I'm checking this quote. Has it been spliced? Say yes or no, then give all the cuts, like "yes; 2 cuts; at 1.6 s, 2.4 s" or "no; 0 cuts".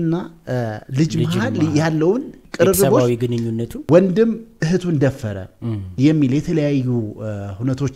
yes; 2 cuts; at 2.4 s, 3.8 s